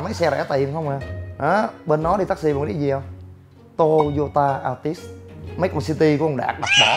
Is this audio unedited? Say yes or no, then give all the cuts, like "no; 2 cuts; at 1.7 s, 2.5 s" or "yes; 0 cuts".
yes; 0 cuts